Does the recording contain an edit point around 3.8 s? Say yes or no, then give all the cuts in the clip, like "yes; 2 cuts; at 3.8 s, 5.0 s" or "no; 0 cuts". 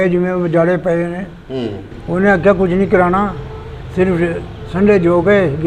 no; 1 cut; at 2.0 s